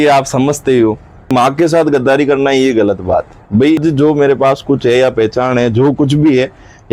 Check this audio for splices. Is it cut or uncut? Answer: cut